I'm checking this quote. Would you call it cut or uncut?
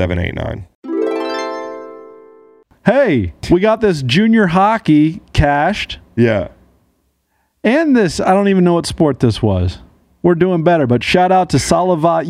cut